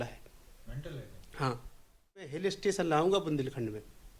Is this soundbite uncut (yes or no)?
no